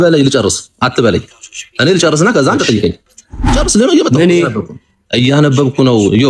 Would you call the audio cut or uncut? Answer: cut